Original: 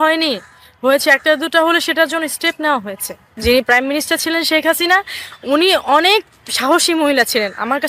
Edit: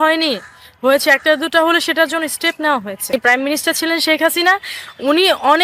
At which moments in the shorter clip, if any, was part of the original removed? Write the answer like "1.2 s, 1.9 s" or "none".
3.1 s